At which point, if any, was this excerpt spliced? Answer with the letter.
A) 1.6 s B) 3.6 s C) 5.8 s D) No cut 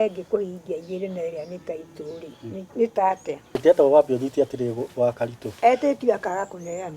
B